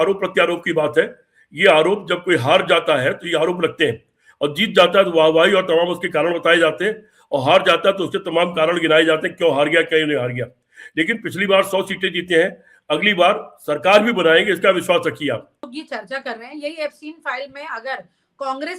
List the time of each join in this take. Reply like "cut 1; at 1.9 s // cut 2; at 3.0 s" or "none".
cut 1; at 15.8 s